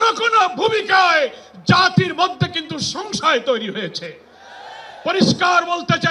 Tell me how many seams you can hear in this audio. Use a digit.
0